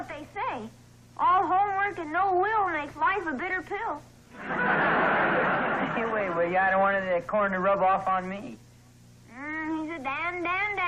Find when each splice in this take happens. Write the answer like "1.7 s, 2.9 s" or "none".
none